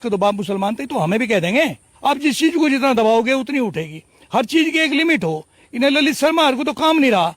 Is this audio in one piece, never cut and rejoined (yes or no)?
no